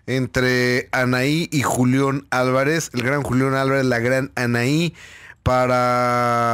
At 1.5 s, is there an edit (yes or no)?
no